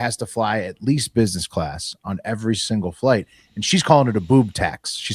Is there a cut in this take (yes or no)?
no